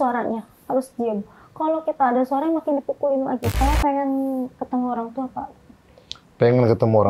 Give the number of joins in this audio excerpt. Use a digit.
1